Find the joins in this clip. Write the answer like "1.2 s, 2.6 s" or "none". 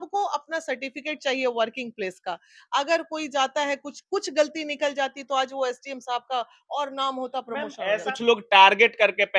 8.1 s